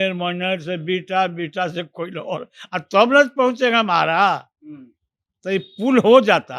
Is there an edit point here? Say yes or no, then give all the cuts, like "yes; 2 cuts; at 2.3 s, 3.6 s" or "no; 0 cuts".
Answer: no; 0 cuts